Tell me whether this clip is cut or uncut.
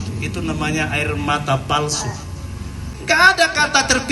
cut